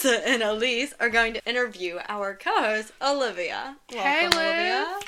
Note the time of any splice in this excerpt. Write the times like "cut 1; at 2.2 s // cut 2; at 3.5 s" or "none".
cut 1; at 1.4 s